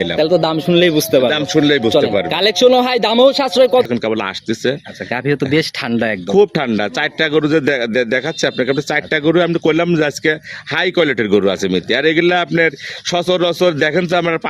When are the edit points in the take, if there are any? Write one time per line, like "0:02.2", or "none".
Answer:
0:03.9